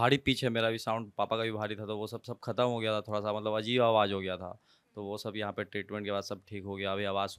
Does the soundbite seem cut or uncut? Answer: uncut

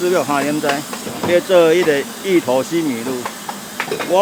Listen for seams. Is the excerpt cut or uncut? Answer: uncut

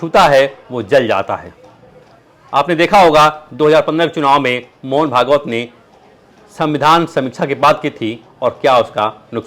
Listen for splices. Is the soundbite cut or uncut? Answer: uncut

